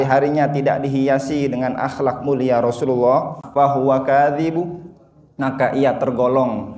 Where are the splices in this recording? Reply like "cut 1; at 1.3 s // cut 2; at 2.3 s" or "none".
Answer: cut 1; at 3.4 s